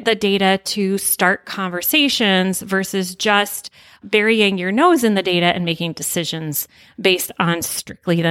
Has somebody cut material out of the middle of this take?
no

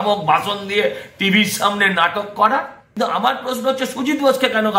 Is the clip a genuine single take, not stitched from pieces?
no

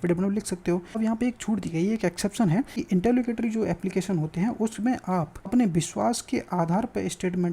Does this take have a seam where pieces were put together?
yes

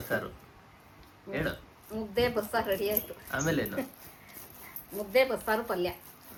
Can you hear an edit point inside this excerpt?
no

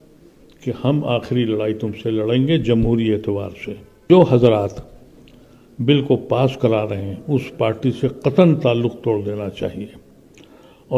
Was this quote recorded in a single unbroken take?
no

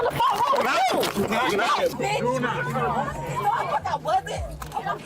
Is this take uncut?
yes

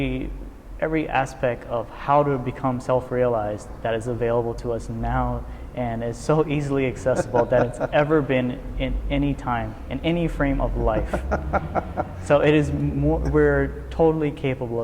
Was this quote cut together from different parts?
no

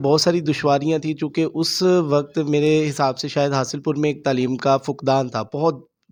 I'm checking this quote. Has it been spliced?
no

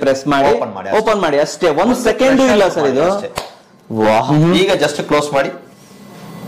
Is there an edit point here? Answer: yes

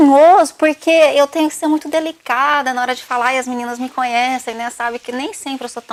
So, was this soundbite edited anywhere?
no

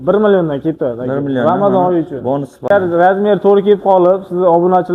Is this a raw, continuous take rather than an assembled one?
no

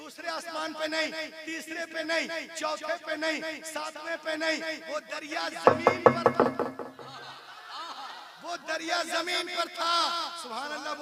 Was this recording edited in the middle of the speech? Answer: no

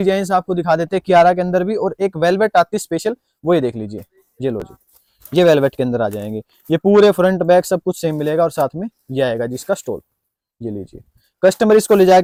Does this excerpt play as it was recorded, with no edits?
yes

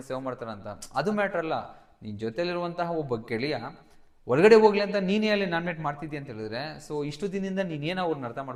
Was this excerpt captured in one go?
yes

